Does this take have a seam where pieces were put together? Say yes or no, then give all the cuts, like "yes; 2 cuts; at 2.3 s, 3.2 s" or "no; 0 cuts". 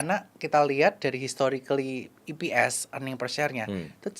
no; 0 cuts